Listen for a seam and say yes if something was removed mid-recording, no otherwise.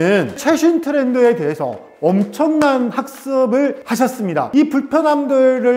no